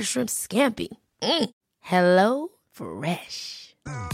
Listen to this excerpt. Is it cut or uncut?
uncut